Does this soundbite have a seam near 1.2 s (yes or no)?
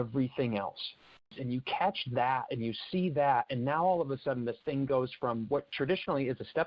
yes